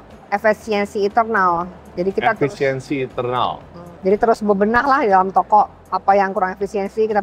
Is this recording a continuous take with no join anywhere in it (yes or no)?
yes